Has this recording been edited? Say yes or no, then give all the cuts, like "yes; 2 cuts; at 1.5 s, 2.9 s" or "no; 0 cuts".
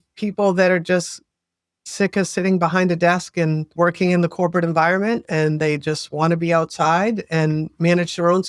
yes; 1 cut; at 3.7 s